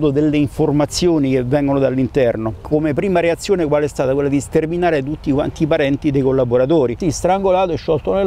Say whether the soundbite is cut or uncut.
cut